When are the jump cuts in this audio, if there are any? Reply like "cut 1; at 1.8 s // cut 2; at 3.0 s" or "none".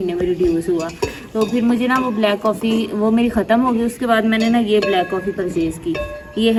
none

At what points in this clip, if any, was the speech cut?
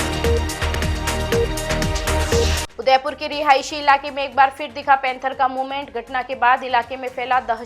cut 1; at 2.5 s

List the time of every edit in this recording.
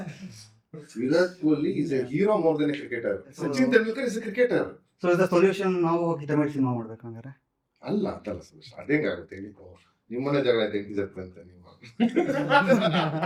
none

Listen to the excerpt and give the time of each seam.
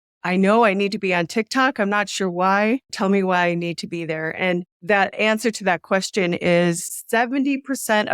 cut 1; at 2.9 s // cut 2; at 6.9 s

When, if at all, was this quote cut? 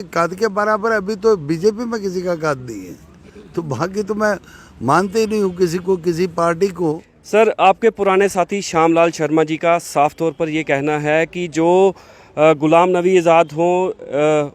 cut 1; at 7.1 s

